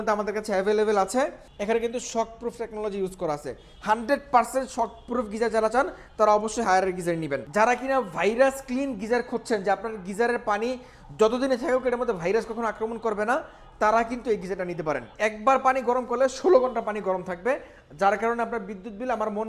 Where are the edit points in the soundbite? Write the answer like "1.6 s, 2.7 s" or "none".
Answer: 1.5 s, 7.4 s, 15.1 s